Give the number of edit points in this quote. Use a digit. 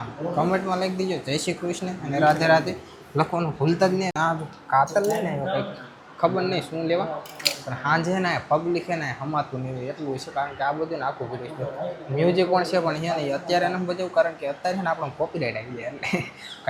0